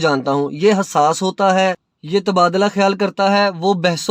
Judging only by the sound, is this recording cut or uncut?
cut